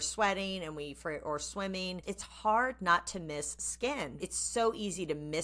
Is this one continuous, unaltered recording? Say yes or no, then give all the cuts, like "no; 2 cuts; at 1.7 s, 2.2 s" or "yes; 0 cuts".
no; 2 cuts; at 2.1 s, 4.2 s